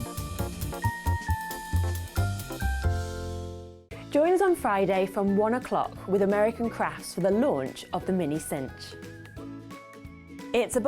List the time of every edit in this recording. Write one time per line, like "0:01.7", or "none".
0:03.8